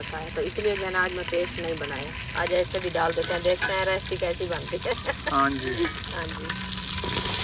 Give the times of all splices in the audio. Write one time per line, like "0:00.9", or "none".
none